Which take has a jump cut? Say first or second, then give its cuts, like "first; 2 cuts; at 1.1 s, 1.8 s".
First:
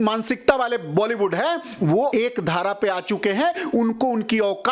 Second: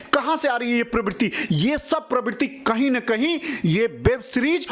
first; 1 cut; at 2.1 s